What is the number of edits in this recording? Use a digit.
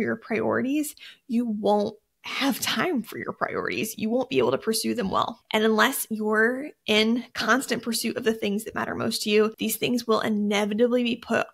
2